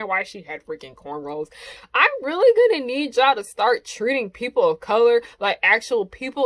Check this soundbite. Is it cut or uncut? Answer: cut